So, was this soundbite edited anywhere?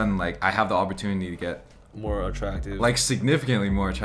no; 0 cuts

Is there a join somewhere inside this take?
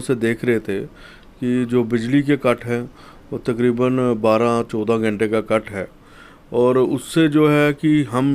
no; 0 cuts

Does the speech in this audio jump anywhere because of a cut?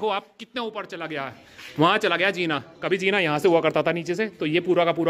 no; 0 cuts

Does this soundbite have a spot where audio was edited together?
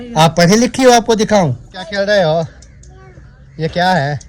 yes; 1 cut; at 1.8 s

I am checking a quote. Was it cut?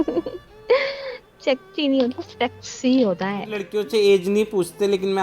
yes; 1 cut; at 3.7 s

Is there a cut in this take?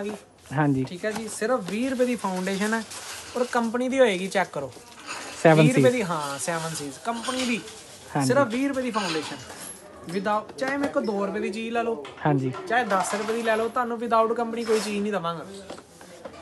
no; 0 cuts

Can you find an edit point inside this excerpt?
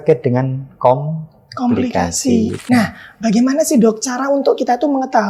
yes; 1 cut; at 2.6 s

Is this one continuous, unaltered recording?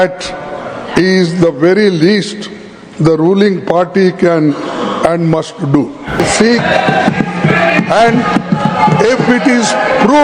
no; 1 cut; at 6.2 s

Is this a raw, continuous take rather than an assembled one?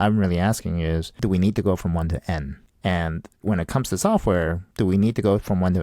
no; 4 cuts; at 1.1 s, 2.6 s, 3.3 s, 4.6 s

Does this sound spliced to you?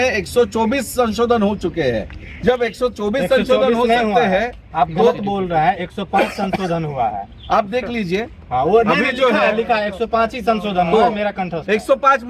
no; 0 cuts

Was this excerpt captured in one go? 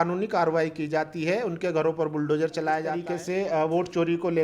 no; 1 cut; at 2.9 s

